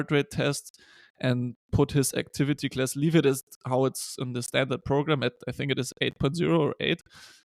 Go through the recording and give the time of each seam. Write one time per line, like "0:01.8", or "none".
none